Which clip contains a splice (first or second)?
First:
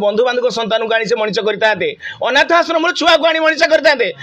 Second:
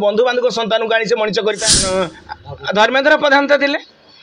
second